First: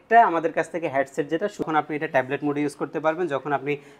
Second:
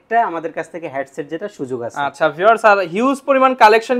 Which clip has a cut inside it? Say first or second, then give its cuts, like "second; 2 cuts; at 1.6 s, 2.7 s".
first; 1 cut; at 1.7 s